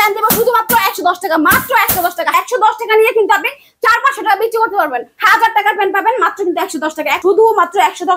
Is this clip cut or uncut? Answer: cut